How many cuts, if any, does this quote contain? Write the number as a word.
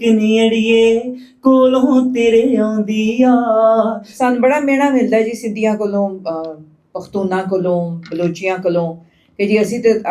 one